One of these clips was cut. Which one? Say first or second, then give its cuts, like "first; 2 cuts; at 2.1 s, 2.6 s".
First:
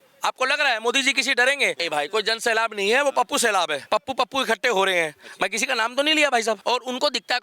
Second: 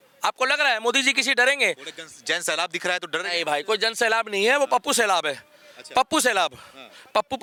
first; 3 cuts; at 1.8 s, 3.8 s, 6.6 s